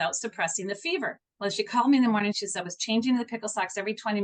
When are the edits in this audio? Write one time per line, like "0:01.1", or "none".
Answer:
0:01.2
0:02.4